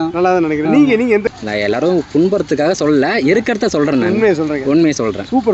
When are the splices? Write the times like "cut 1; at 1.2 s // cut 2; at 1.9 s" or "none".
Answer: cut 1; at 1.2 s